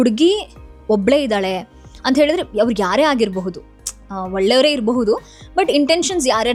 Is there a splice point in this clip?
no; 0 cuts

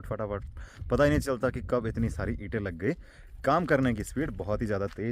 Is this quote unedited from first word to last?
yes; 0 cuts

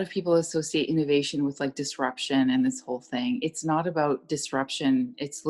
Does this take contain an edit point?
no; 0 cuts

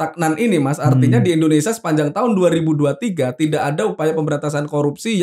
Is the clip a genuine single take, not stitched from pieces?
yes; 0 cuts

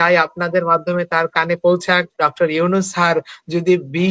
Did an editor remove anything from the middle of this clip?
yes; 1 cut; at 2.1 s

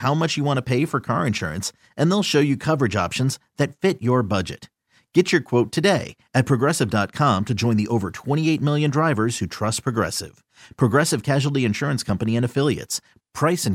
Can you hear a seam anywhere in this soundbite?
no; 0 cuts

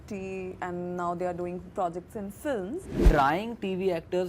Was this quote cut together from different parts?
yes; 1 cut; at 2.9 s

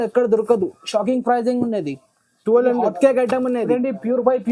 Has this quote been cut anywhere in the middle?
yes; 1 cut; at 3.6 s

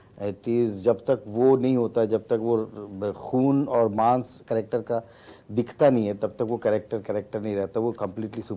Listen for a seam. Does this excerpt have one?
no; 0 cuts

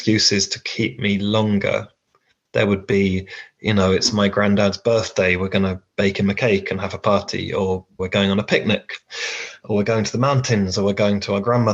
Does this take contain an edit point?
no; 0 cuts

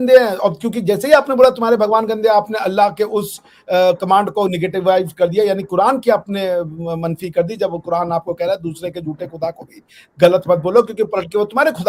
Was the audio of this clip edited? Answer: no; 0 cuts

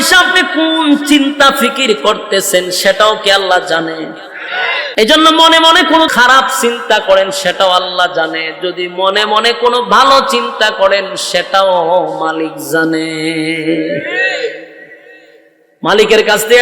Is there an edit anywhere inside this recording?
yes; 2 cuts; at 4.8 s, 6.1 s

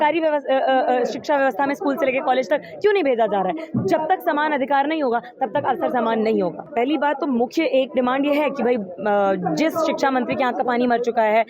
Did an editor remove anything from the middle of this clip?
no; 0 cuts

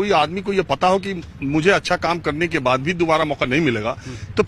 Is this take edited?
no; 0 cuts

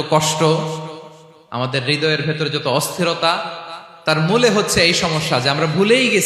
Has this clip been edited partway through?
no; 0 cuts

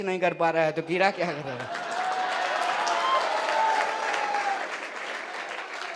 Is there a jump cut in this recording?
no; 0 cuts

